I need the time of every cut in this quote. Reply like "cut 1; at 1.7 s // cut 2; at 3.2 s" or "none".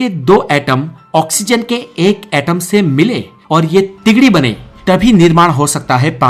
none